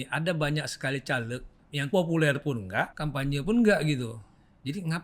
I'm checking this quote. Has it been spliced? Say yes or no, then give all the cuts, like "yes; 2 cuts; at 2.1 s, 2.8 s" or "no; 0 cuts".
yes; 2 cuts; at 1.9 s, 3.0 s